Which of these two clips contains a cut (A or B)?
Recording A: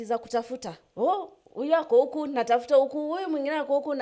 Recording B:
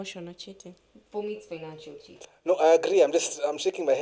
B